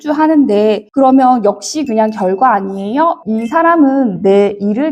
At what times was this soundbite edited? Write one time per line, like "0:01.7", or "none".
0:03.2